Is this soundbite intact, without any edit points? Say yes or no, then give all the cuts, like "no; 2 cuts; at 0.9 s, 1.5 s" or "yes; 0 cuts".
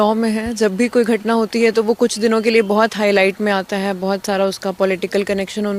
yes; 0 cuts